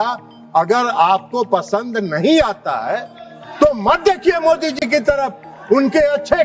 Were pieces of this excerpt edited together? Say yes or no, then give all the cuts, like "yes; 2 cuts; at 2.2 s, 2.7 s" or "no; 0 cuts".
no; 0 cuts